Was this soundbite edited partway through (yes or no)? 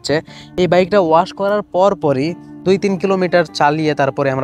no